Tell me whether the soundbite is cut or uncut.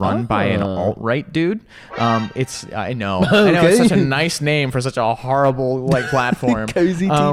uncut